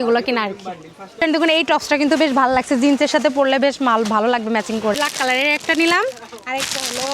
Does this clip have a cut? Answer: yes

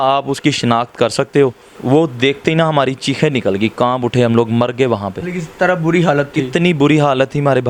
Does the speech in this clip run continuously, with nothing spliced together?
no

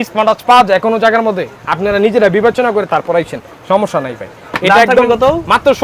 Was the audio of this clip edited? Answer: no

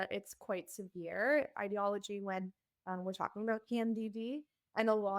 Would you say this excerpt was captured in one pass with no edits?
no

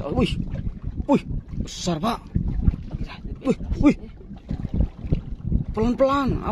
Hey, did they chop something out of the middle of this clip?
no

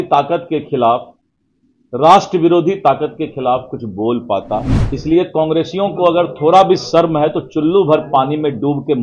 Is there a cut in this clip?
yes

